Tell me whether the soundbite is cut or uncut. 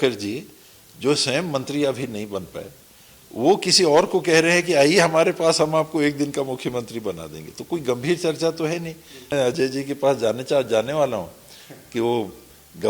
cut